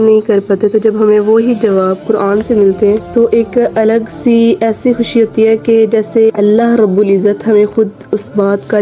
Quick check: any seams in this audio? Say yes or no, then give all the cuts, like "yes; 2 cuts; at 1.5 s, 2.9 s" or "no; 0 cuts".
yes; 2 cuts; at 3.1 s, 6.3 s